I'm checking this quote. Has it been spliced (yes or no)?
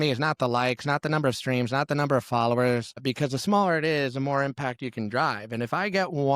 yes